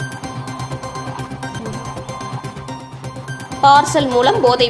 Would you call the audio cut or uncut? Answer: cut